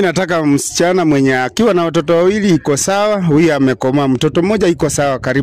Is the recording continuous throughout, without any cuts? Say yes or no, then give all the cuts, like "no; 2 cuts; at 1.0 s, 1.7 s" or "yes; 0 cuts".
yes; 0 cuts